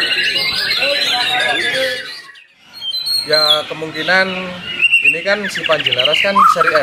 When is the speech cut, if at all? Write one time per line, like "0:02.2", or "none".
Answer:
none